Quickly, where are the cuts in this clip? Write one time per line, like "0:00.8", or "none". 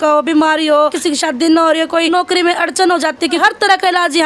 0:01.0
0:02.1
0:03.4